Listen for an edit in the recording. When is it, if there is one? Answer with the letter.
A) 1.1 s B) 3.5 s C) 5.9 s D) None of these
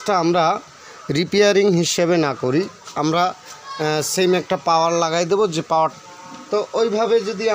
C